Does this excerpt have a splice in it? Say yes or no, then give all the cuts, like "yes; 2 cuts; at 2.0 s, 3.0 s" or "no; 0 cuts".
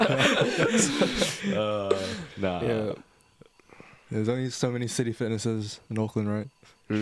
no; 0 cuts